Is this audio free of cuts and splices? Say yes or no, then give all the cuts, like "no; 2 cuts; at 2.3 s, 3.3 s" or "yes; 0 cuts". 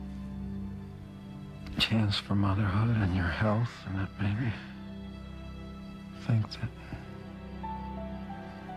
no; 1 cut; at 6.7 s